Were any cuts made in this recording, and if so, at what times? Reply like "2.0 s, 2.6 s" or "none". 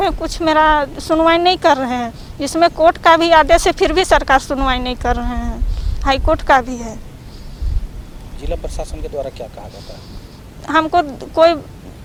none